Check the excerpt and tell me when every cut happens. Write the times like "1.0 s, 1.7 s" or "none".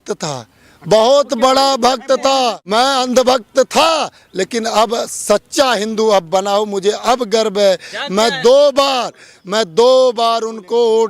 2.6 s